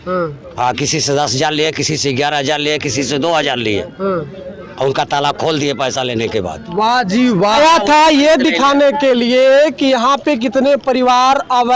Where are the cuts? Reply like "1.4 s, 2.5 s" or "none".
7.6 s